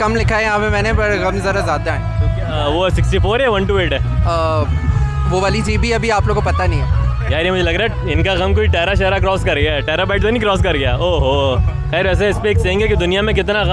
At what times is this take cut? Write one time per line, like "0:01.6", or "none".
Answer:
none

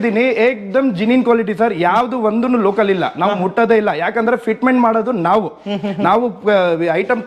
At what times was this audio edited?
none

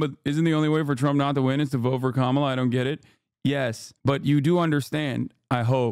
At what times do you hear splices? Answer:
none

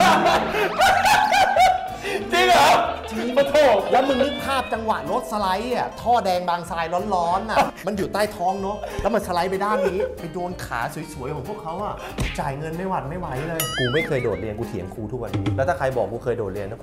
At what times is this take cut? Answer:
0:13.7

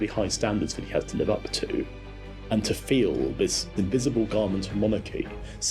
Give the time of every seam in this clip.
0:02.0
0:03.7

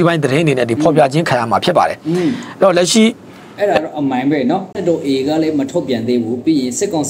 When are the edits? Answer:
0:04.8

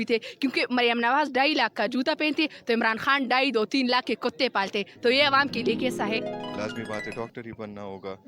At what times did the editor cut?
0:06.5

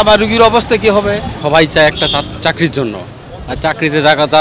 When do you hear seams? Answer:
0:01.3

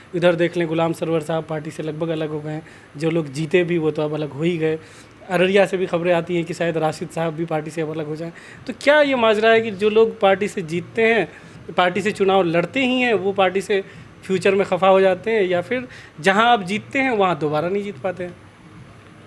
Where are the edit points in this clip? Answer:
none

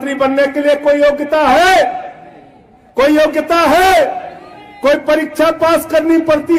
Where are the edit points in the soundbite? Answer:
none

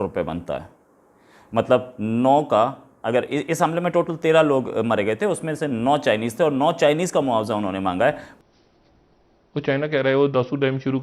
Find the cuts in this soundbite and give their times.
0:08.3

